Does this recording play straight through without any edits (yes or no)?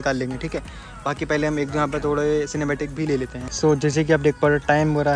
yes